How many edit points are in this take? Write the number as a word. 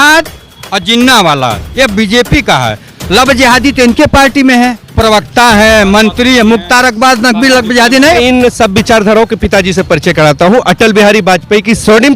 one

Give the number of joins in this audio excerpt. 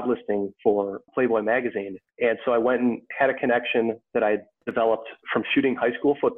two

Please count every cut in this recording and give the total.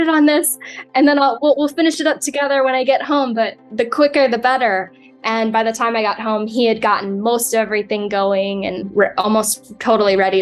one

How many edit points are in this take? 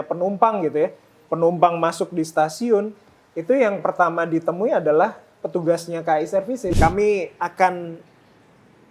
one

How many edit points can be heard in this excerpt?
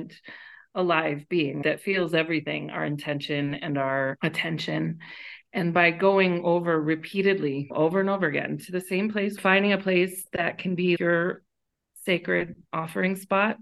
three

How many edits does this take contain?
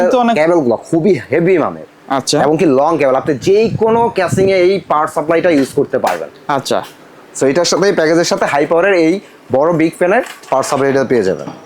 zero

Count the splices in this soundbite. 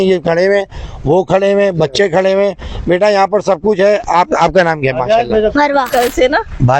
one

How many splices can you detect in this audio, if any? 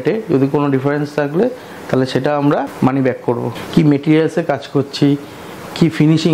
two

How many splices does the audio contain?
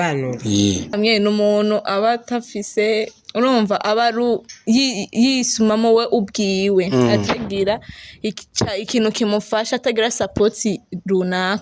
one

